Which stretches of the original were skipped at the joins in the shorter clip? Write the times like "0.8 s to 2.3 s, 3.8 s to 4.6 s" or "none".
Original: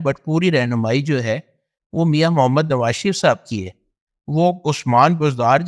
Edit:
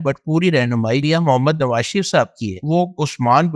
1.0 s to 2.1 s, 3.6 s to 4.1 s